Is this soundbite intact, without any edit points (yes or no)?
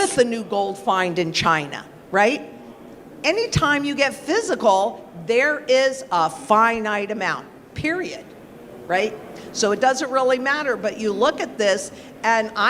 yes